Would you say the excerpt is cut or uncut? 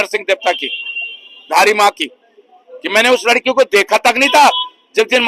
uncut